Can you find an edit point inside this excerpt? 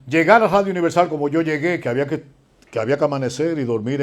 no; 0 cuts

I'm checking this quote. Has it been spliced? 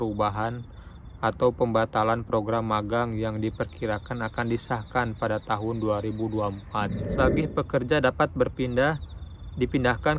yes; 1 cut; at 7.1 s

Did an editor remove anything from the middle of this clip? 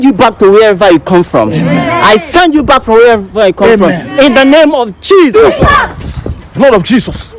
yes; 1 cut; at 5.3 s

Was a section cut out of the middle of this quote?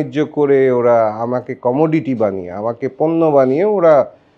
no; 0 cuts

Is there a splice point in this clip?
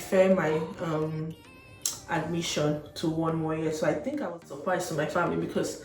yes; 1 cut; at 4.4 s

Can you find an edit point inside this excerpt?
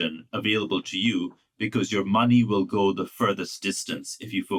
no; 0 cuts

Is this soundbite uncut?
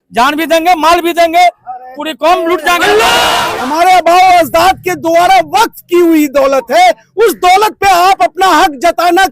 no; 1 cut; at 3.4 s

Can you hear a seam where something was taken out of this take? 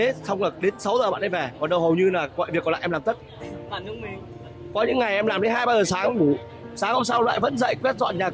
no; 0 cuts

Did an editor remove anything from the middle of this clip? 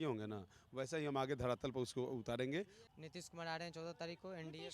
yes; 1 cut; at 2.8 s

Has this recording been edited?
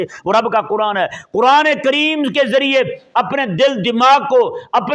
no; 0 cuts

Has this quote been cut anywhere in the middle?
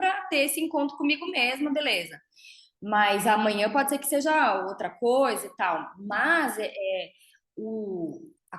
no; 0 cuts

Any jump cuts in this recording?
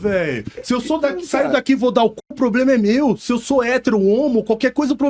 no; 0 cuts

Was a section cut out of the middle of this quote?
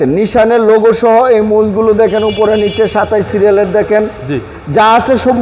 no; 0 cuts

